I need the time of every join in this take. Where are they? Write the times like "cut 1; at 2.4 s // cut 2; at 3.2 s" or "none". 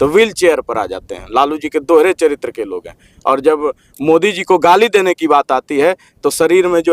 none